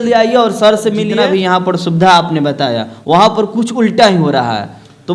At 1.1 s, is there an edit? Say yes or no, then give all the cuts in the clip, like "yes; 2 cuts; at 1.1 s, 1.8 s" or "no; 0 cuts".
yes; 1 cut; at 1.1 s